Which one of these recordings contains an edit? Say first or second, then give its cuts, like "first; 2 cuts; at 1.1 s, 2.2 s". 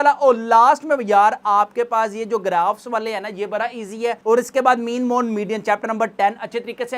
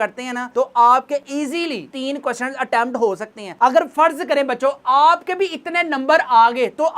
second; 1 cut; at 3.5 s